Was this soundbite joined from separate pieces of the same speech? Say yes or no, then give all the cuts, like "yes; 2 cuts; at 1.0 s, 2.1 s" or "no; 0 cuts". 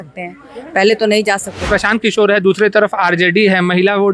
yes; 1 cut; at 1.7 s